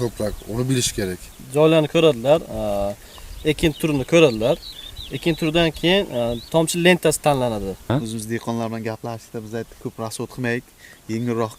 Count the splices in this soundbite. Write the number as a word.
two